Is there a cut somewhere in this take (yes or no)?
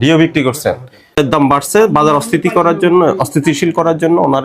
yes